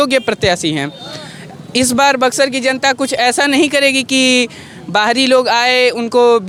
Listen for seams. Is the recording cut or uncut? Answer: uncut